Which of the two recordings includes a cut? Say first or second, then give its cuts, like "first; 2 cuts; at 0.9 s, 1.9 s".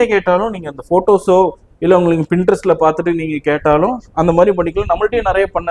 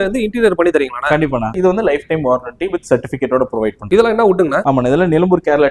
second; 3 cuts; at 1.5 s, 3.8 s, 4.6 s